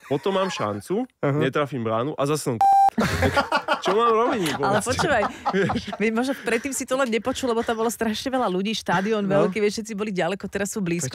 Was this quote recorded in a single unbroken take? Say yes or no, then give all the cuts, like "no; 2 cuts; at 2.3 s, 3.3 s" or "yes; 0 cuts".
yes; 0 cuts